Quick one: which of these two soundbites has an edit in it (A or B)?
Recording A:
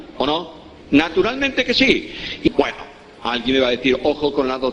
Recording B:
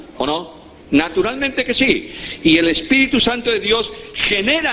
B